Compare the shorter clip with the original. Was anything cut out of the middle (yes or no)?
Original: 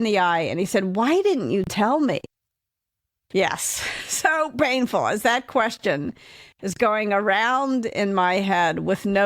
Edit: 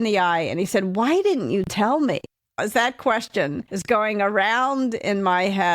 yes